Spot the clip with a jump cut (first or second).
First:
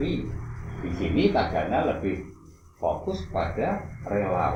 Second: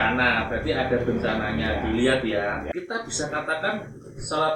second